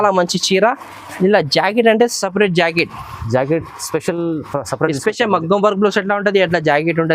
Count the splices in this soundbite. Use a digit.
0